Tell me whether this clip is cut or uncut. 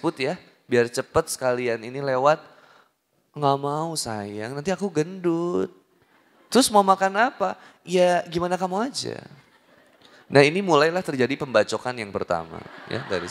uncut